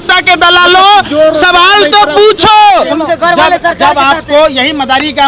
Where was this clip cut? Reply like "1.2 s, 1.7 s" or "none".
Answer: 2.9 s